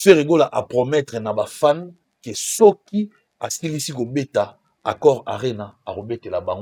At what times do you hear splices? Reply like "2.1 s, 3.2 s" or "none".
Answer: none

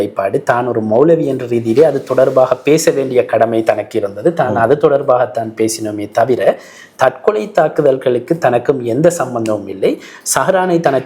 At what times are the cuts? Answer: none

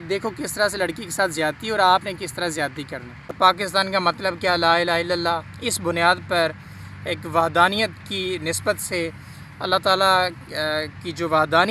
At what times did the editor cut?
3.3 s

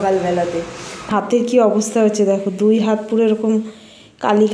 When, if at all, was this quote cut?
1.1 s

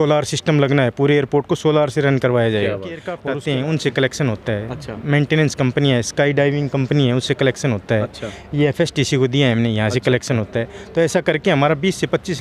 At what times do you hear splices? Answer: 3.1 s

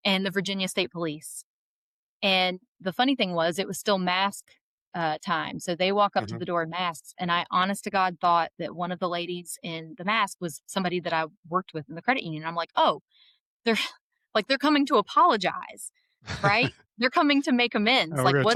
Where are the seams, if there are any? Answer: none

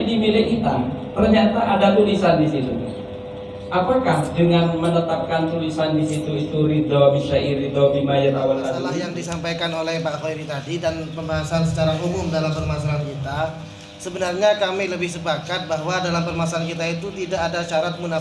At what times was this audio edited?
9.0 s

